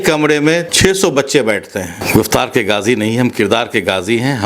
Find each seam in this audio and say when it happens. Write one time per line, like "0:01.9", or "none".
0:01.9

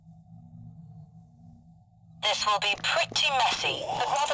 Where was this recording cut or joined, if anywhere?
0:02.2

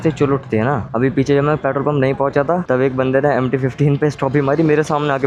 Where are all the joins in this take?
none

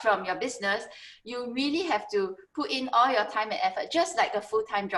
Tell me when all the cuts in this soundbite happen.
none

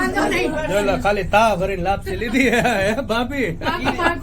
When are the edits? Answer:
0:02.7

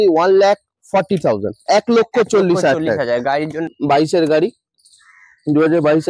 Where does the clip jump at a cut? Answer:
0:03.7

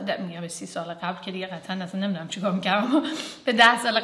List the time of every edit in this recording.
none

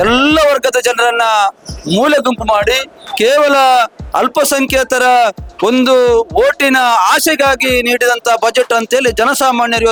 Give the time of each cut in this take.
none

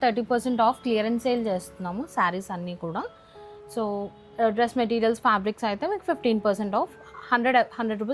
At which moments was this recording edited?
none

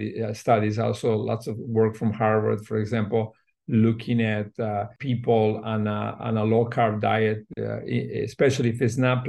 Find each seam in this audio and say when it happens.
0:05.0

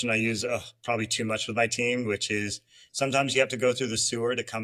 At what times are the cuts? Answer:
none

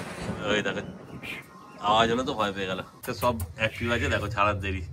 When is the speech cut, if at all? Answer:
0:03.0

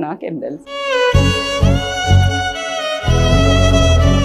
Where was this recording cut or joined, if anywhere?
none

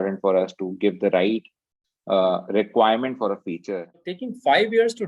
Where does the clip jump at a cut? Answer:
0:04.0

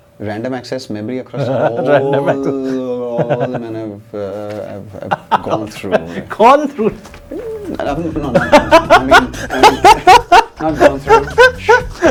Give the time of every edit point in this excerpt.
none

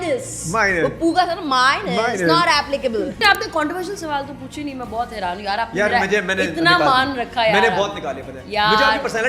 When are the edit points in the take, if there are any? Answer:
0:03.2

